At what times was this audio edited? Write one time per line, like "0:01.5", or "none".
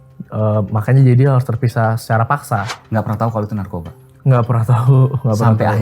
0:02.7

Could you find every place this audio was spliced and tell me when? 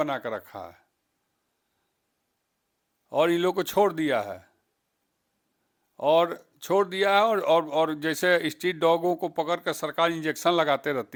none

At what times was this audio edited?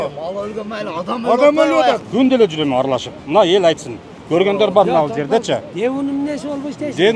0:02.0

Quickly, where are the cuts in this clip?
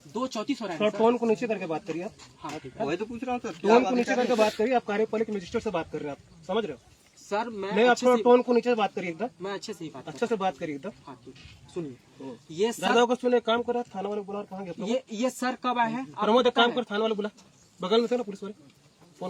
none

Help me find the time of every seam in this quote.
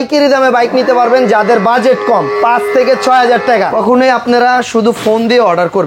0:03.7

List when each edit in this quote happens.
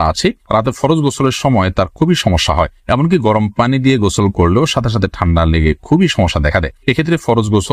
none

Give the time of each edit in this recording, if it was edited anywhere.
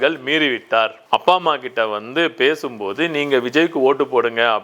0:01.0

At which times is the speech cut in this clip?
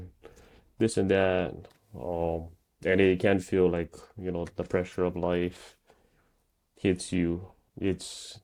none

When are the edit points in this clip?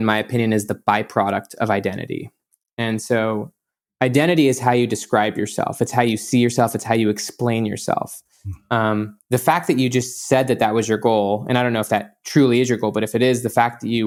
none

